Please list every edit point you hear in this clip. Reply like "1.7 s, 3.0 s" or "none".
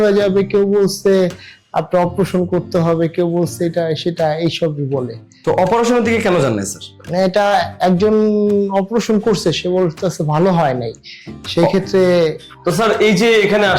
12.5 s

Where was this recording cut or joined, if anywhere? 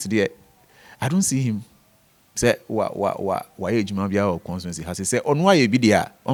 none

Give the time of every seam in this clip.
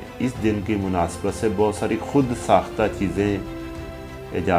none

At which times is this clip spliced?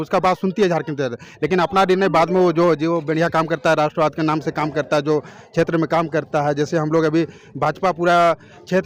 none

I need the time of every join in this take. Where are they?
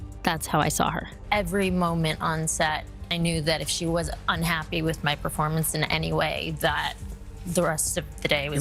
none

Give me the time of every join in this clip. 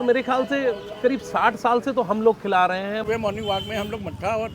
3.0 s

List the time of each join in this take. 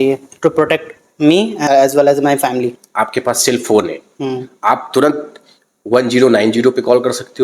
1.6 s, 2.7 s

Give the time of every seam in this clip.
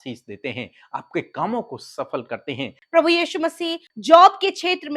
2.8 s, 3.8 s

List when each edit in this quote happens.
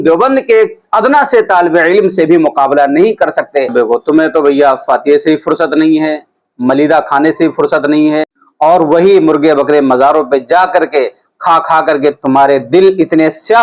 3.7 s, 8.4 s

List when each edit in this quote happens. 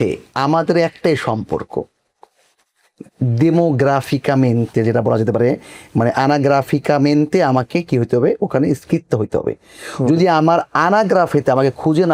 none

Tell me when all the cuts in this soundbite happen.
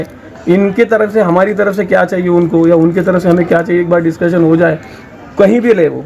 none

